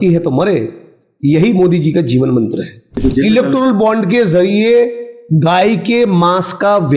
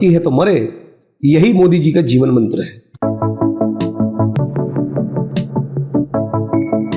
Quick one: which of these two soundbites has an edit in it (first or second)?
first